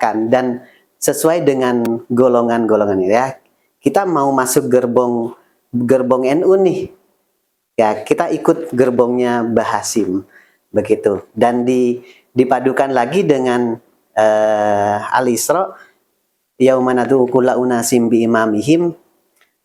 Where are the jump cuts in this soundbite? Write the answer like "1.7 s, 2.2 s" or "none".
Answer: none